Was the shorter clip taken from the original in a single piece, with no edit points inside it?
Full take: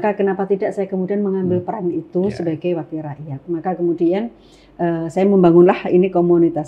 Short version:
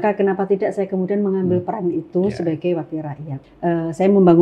no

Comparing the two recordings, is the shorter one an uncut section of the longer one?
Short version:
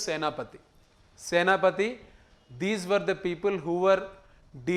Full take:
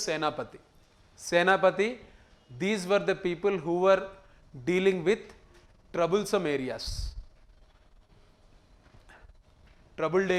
yes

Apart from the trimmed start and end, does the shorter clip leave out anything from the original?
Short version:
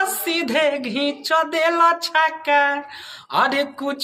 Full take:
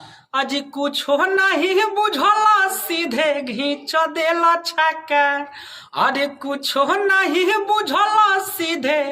no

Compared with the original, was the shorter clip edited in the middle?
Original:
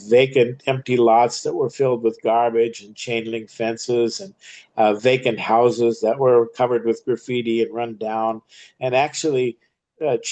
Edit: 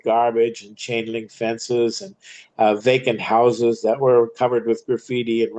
no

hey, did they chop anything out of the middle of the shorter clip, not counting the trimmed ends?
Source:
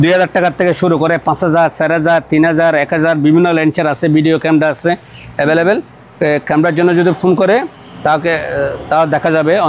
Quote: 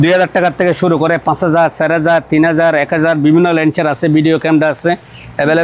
no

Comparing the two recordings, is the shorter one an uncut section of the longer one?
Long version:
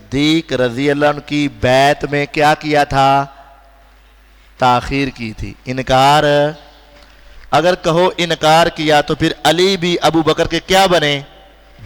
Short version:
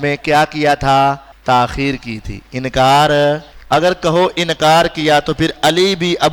no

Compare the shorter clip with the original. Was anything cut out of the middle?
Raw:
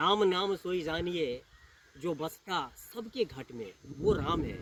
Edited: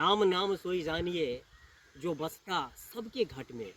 no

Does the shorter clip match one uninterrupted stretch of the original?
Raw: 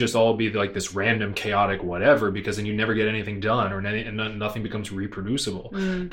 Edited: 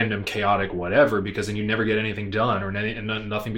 yes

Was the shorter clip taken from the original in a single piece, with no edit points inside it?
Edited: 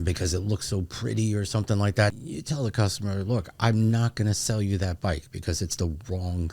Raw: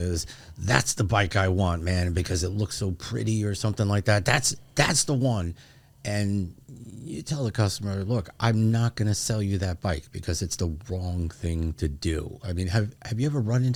no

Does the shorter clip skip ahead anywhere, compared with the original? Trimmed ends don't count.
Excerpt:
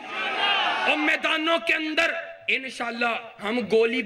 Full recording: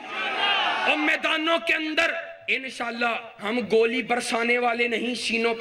no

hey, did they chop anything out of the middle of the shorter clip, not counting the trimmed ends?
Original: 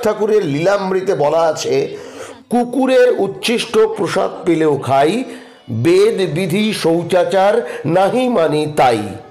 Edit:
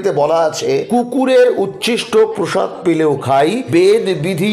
yes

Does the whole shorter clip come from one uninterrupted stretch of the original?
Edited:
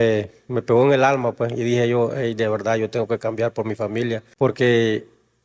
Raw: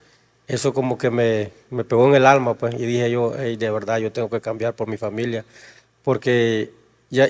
no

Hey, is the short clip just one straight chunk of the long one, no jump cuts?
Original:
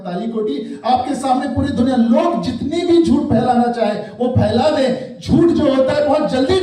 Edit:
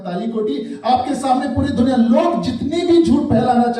yes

